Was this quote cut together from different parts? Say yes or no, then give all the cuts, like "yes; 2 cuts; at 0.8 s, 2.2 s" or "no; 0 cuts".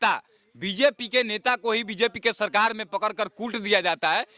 no; 0 cuts